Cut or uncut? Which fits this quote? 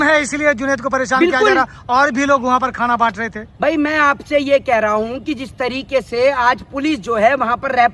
uncut